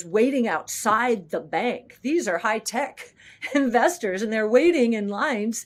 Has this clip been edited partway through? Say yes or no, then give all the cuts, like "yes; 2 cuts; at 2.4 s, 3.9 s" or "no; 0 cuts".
no; 0 cuts